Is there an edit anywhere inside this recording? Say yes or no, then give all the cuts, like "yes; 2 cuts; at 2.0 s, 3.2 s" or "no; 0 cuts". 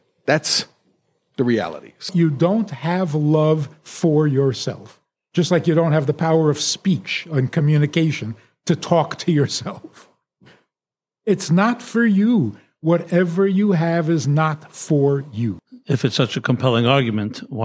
yes; 2 cuts; at 2.1 s, 15.7 s